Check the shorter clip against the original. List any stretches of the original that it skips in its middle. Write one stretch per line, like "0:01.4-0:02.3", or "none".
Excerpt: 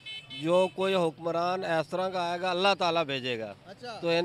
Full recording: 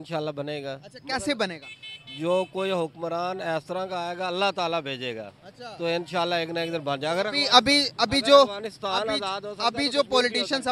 none